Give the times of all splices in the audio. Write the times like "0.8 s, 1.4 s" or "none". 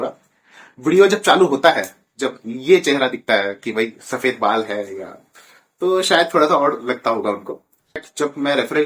8.0 s